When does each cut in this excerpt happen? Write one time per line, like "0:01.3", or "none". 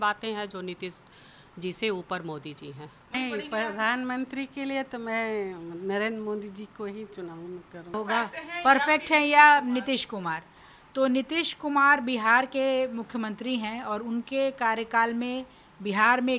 0:03.1
0:07.9